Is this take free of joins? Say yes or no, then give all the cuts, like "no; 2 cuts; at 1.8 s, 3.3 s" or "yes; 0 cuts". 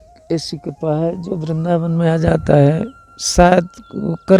yes; 0 cuts